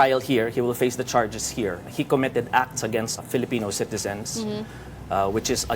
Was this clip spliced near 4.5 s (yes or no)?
no